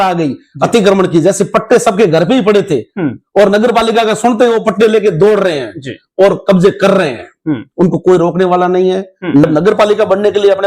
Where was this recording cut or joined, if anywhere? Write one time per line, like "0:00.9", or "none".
0:09.4